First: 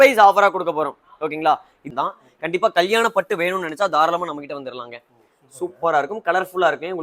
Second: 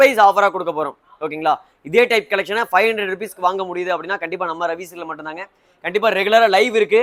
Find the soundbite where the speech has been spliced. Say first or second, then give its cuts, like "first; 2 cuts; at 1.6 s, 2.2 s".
first; 1 cut; at 1.7 s